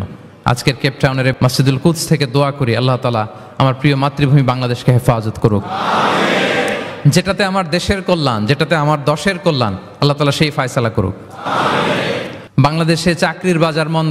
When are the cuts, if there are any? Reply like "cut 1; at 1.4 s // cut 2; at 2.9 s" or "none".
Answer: cut 1; at 1.3 s // cut 2; at 12.4 s